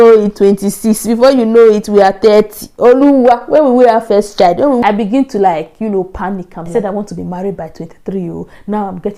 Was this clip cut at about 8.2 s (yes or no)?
no